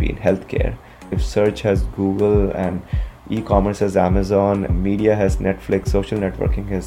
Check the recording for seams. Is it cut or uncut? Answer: uncut